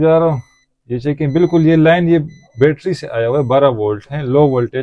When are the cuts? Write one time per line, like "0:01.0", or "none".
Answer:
none